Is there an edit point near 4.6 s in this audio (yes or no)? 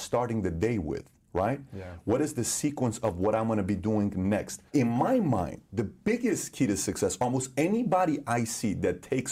yes